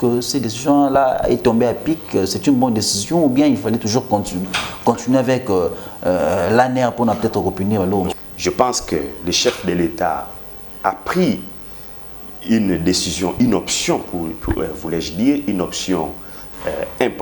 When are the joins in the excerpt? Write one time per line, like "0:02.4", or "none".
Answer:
0:08.1